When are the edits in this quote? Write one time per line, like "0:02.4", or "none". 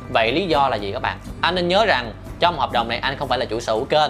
0:01.2

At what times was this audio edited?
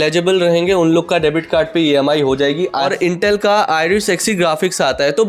0:02.7

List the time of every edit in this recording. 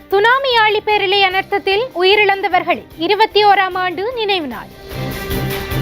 0:04.9

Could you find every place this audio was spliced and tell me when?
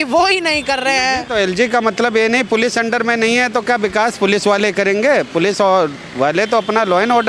none

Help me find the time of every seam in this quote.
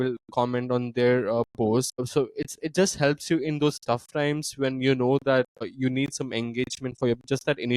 0:02.1
0:05.7

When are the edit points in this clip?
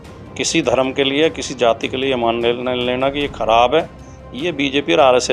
none

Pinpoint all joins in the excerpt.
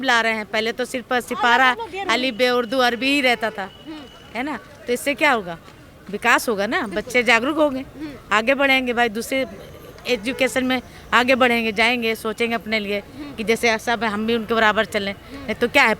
none

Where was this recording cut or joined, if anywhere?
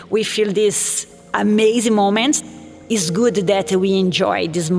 0:02.4

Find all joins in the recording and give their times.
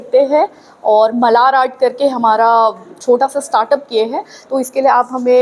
0:02.9

